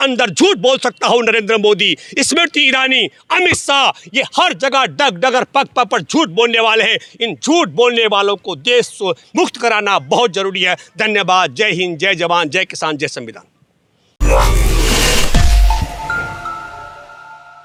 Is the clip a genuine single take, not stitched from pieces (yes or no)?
yes